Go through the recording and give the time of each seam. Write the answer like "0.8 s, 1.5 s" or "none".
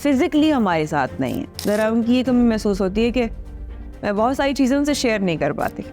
1.5 s